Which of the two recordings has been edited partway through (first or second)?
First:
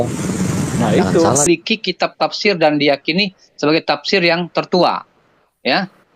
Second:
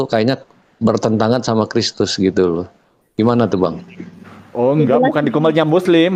first